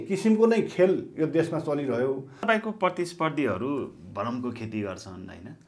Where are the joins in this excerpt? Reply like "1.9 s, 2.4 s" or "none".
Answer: 2.4 s